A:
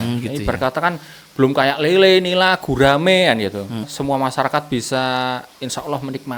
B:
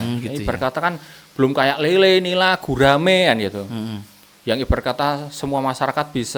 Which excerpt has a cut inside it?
A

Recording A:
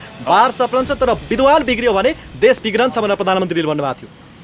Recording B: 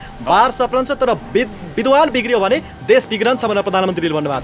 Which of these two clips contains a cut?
A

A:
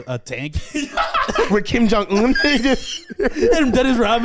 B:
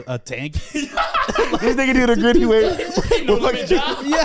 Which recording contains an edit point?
A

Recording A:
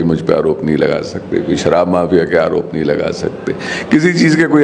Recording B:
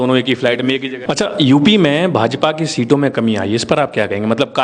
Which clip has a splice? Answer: B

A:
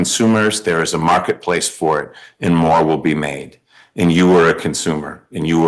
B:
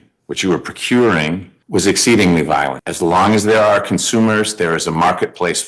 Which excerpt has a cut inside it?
B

